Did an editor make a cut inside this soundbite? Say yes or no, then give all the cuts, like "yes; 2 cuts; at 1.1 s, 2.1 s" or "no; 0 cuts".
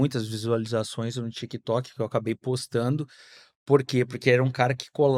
no; 0 cuts